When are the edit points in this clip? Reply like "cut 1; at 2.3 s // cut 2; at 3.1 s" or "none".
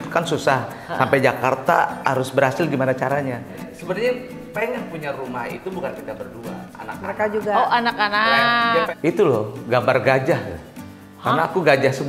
cut 1; at 3.6 s // cut 2; at 8.9 s